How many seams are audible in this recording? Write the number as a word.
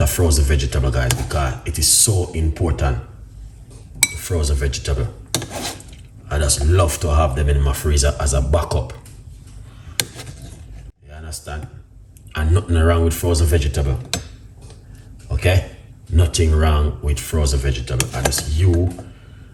zero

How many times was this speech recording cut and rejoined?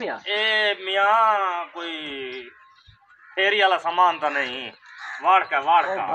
zero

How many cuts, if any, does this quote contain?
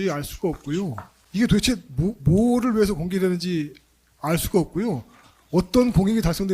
one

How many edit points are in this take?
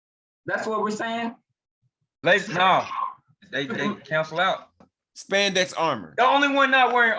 one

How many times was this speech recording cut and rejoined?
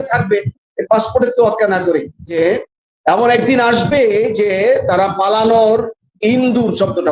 one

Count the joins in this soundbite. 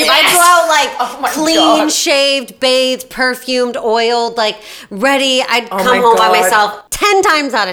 one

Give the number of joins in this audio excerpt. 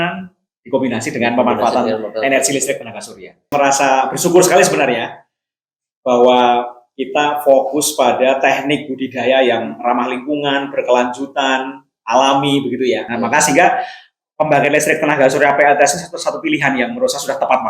two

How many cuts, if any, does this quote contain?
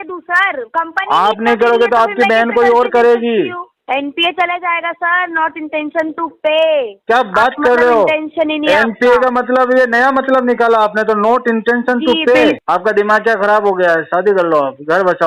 two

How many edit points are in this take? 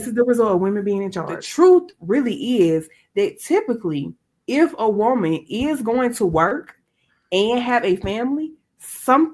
one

